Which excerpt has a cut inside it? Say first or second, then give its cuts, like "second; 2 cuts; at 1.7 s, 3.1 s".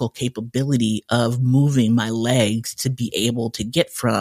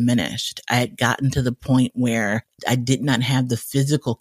second; 1 cut; at 2.5 s